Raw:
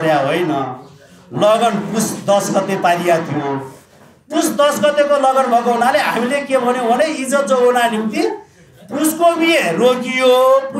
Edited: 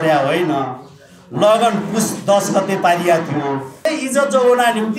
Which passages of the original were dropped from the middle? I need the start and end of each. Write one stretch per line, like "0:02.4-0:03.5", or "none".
0:03.9-0:07.0